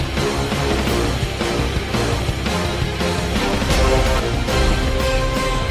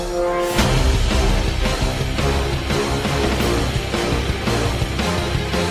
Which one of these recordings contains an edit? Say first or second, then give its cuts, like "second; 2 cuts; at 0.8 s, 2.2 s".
first; 1 cut; at 4.2 s